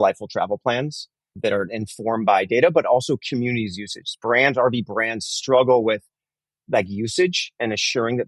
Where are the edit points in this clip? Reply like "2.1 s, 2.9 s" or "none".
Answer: 1.3 s